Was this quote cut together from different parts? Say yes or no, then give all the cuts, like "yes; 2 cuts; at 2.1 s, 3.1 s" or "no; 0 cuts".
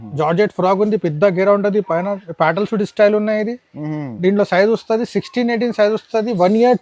no; 0 cuts